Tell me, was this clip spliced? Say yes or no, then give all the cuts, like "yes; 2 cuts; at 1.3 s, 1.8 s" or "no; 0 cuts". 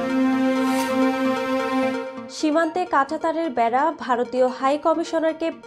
yes; 1 cut; at 2.1 s